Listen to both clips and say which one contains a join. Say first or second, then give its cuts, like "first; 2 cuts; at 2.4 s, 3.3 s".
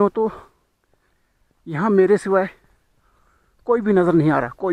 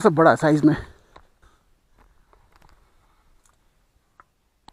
second; 1 cut; at 1.4 s